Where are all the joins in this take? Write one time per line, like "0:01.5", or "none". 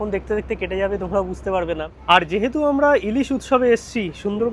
0:01.9